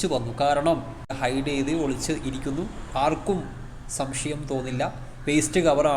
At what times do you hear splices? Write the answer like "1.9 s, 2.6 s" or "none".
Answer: 1.1 s